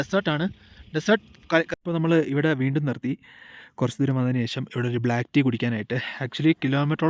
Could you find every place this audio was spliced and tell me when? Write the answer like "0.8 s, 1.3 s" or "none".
1.8 s